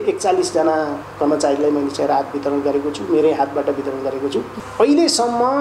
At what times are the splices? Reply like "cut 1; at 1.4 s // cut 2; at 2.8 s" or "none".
cut 1; at 4.6 s